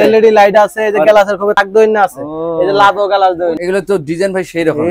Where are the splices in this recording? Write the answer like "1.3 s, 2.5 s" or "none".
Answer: 1.6 s, 3.6 s